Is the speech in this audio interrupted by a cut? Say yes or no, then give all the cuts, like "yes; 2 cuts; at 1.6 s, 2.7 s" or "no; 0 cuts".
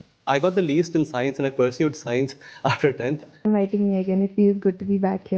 yes; 1 cut; at 3.5 s